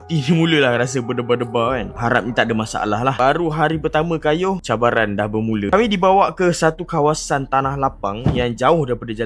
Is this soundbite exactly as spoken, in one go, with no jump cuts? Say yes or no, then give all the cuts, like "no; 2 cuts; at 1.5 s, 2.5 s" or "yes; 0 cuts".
no; 1 cut; at 5.7 s